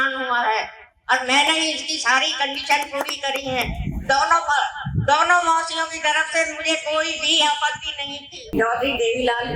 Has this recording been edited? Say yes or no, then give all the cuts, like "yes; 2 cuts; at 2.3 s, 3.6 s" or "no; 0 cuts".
yes; 1 cut; at 8.4 s